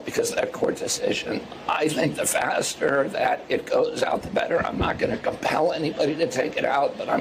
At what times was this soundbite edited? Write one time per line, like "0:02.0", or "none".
none